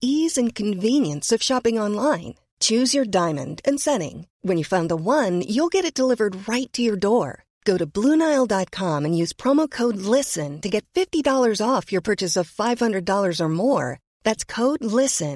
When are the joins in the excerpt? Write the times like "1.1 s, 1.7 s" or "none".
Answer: none